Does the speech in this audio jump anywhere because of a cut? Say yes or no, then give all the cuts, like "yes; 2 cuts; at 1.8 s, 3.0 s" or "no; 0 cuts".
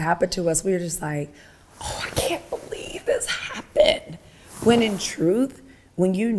no; 0 cuts